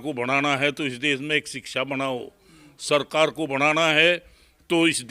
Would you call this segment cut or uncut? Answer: uncut